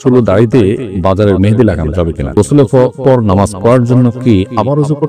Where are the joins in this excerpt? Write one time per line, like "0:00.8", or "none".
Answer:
0:00.9
0:02.3